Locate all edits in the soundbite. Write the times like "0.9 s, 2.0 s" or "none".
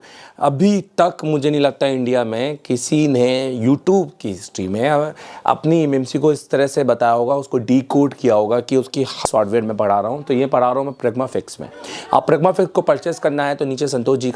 9.2 s